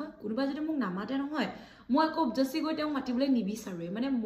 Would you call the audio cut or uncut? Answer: uncut